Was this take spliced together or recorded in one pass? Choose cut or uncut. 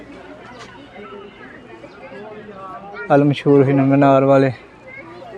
uncut